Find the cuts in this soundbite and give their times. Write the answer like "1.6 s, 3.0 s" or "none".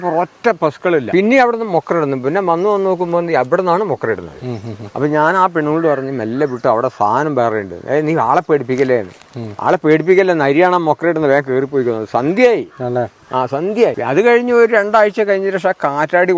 1.1 s, 14.0 s